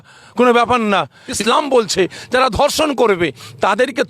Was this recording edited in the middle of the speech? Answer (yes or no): yes